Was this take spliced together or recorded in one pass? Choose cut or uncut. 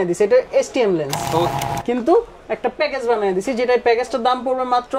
cut